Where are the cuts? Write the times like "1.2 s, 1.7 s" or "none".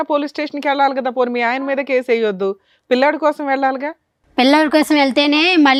none